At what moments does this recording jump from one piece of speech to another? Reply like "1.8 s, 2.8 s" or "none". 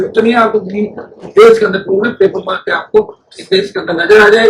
none